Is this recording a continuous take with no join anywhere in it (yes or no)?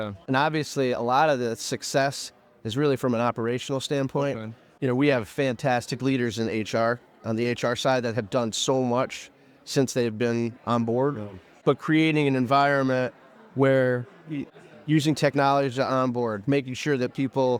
no